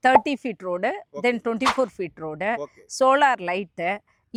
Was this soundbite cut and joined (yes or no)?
no